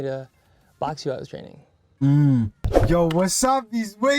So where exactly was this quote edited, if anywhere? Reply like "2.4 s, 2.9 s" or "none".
2.7 s